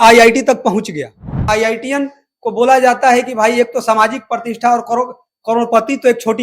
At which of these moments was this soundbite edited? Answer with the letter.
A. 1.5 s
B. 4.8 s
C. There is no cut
A